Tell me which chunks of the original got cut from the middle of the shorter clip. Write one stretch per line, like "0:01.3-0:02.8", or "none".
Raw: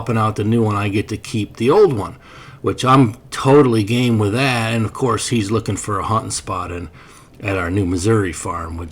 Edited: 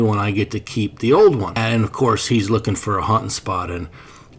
0:02.2-0:04.6

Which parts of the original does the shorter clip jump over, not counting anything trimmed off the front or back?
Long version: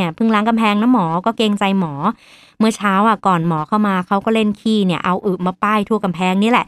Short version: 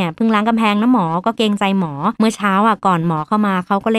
0:02.1-0:02.5

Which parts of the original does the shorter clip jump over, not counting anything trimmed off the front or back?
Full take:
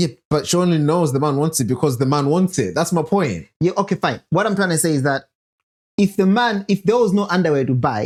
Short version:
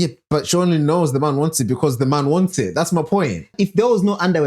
0:03.5-0:06.6

